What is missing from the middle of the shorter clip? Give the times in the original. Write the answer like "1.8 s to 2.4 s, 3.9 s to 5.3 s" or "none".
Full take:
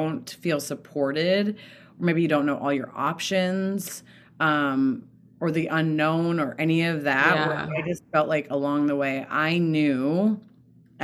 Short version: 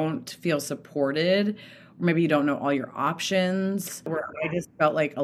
4.2 s to 7.6 s